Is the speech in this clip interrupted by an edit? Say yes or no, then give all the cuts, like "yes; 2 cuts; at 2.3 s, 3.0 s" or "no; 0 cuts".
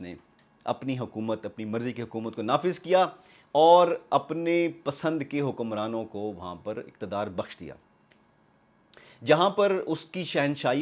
no; 0 cuts